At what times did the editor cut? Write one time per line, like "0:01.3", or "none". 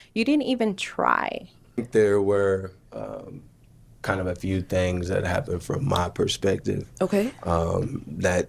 0:01.8